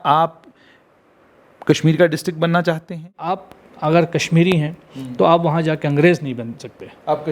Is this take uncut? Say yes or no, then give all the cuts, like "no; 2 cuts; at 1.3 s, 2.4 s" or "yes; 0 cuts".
no; 1 cut; at 3.5 s